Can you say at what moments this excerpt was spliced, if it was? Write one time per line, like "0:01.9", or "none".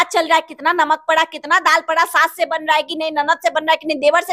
none